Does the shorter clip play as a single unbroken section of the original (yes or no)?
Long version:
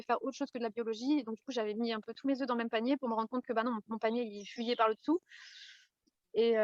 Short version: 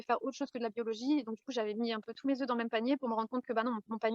yes